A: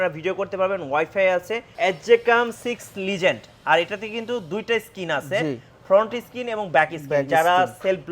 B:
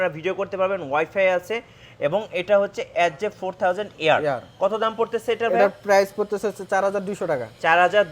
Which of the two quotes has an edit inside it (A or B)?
A